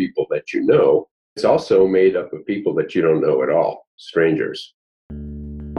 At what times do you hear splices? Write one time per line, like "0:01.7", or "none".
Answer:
0:04.9